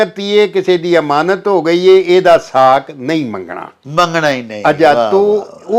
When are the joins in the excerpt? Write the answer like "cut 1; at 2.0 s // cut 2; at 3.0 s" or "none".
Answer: none